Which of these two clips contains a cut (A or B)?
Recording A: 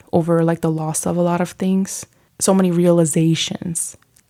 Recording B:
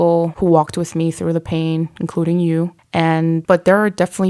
B